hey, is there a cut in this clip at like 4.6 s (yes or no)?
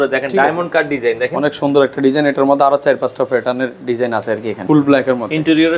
yes